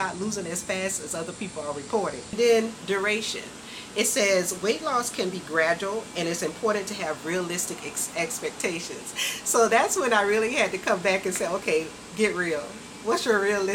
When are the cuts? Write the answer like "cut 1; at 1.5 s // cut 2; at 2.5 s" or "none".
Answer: cut 1; at 2.3 s